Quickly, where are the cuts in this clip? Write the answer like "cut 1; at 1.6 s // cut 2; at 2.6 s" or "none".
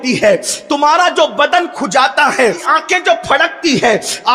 cut 1; at 2.6 s